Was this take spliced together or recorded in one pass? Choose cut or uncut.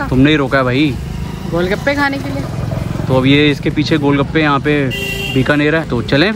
uncut